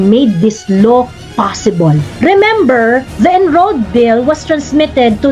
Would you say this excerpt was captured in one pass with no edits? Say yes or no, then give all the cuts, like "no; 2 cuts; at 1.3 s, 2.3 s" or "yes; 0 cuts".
no; 2 cuts; at 2.1 s, 3.1 s